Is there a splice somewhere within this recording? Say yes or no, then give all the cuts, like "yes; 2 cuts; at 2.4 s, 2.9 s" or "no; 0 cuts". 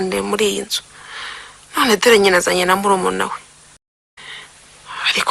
yes; 1 cut; at 3.8 s